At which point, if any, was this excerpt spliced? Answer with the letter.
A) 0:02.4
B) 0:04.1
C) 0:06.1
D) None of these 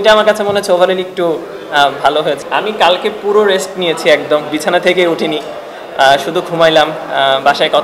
A